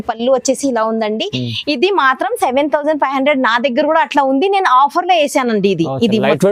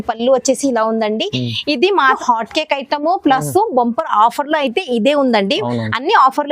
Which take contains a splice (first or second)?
second